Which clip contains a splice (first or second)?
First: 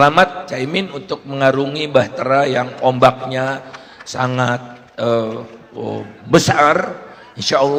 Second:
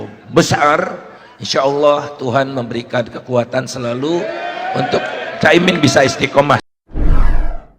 second